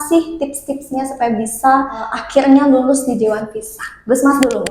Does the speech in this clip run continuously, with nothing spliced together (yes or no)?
no